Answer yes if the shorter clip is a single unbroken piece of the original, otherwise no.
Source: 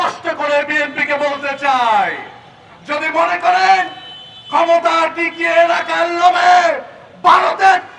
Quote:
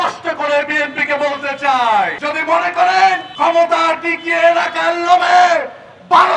no